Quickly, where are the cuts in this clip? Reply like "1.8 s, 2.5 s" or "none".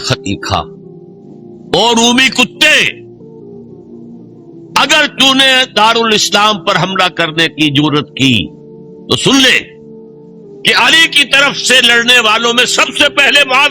3.1 s, 4.7 s